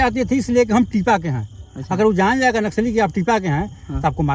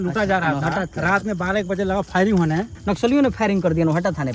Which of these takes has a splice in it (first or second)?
second